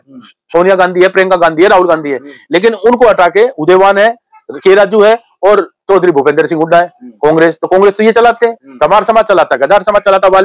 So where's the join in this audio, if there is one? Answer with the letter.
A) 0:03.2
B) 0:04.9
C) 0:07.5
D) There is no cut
D